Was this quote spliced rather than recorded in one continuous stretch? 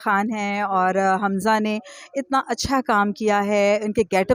no; 0 cuts

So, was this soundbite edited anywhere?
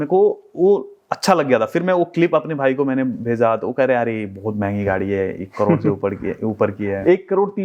no; 0 cuts

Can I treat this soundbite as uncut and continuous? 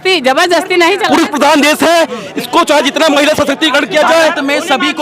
no; 1 cut; at 1.0 s

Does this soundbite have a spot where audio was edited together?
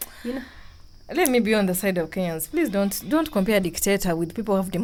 no; 0 cuts

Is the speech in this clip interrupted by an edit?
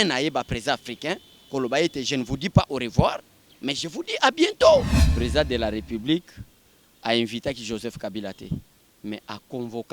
yes; 1 cut; at 5.0 s

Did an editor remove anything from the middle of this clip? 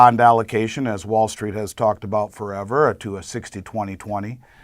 yes; 1 cut; at 2.9 s

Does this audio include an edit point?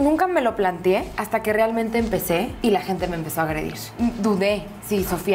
yes; 3 cuts; at 1.2 s, 2.5 s, 3.8 s

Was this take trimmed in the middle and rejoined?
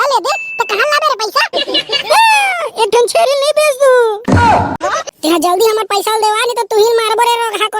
yes; 1 cut; at 4.8 s

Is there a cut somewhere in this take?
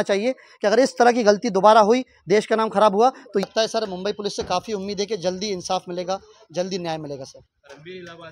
yes; 1 cut; at 3.5 s

